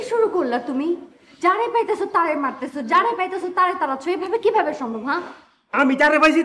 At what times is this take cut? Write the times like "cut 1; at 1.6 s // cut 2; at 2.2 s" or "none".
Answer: none